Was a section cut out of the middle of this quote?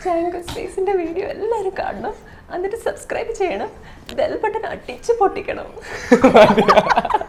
no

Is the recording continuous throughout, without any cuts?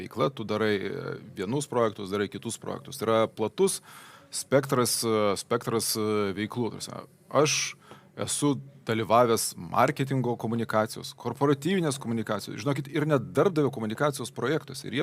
yes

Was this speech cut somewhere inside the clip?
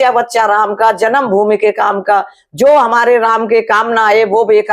no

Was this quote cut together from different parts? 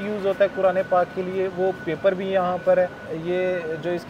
no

